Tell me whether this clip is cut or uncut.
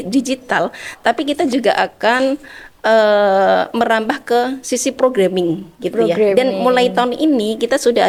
uncut